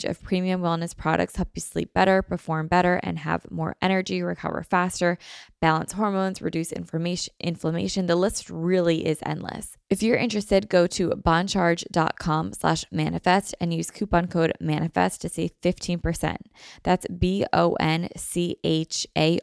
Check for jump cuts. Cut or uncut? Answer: cut